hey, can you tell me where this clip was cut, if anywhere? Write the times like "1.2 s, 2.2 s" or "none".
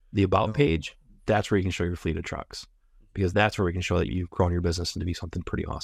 none

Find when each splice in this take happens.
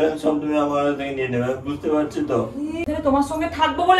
2.9 s

